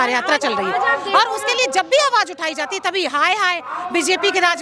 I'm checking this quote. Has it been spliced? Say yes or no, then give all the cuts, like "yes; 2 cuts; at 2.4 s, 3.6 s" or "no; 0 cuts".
no; 0 cuts